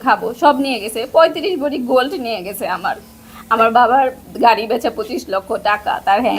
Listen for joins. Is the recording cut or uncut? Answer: uncut